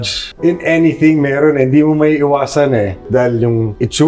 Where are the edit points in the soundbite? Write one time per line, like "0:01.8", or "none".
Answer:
0:03.1